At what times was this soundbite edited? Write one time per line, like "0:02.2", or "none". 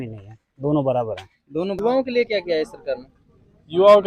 0:01.8

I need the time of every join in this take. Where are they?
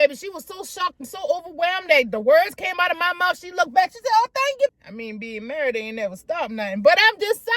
0:04.7

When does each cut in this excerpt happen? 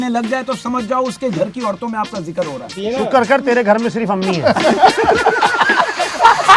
0:02.8

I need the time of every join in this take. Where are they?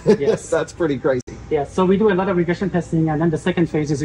none

